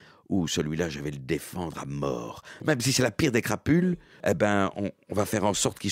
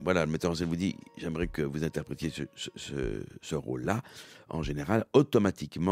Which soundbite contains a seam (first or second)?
first